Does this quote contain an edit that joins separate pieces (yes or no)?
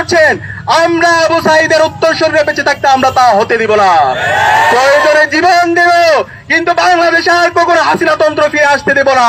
no